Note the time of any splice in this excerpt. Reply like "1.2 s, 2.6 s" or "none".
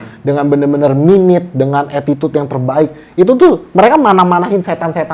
none